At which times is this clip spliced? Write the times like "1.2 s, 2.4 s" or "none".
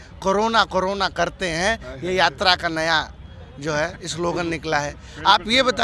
none